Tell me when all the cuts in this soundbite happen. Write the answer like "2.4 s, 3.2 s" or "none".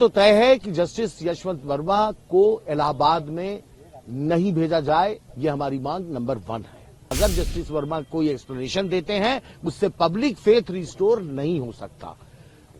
7.1 s